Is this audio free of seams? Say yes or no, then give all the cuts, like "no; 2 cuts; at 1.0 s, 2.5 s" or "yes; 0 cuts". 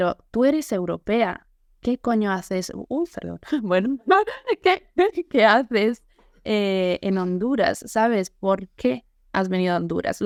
yes; 0 cuts